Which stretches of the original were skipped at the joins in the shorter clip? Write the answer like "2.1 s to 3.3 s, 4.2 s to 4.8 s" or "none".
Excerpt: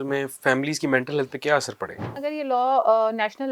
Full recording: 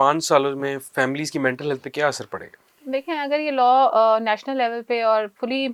2.7 s to 3.2 s

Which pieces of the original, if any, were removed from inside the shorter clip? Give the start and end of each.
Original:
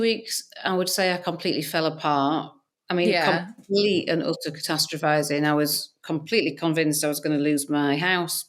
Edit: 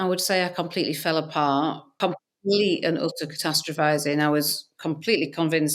2.7 s to 3.3 s

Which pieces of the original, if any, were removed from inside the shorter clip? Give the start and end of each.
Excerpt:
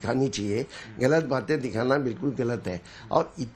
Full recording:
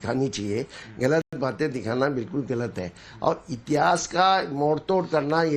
1.3 s to 1.4 s

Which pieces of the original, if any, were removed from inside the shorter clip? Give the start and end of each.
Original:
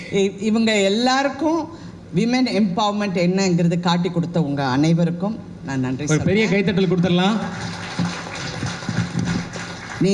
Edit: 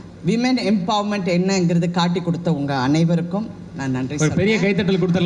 none

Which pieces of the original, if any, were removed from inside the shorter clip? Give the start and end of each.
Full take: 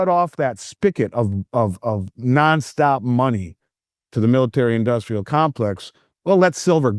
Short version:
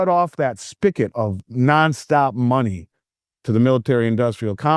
1.1 s to 1.8 s

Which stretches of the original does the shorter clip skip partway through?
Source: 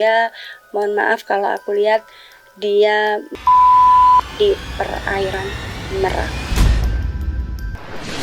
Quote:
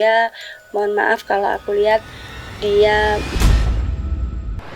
3.3 s to 6.5 s

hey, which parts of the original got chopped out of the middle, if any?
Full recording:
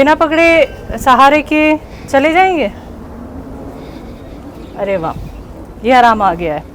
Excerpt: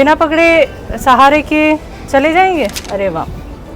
2.8 s to 4.7 s

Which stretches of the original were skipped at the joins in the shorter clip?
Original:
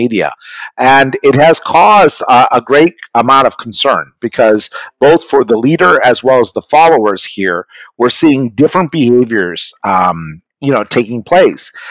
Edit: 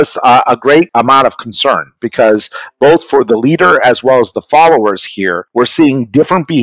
2.9 s to 3.1 s, 7.6 s to 7.8 s

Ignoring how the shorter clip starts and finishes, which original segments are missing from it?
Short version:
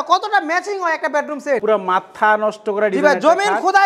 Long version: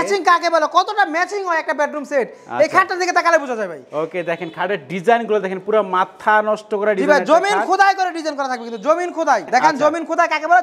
2.3 s to 5.7 s

